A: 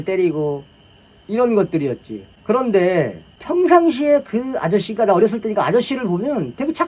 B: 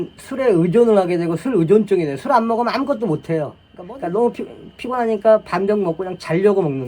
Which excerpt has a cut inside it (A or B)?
B